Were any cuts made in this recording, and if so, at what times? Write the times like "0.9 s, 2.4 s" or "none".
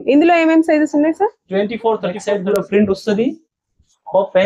2.2 s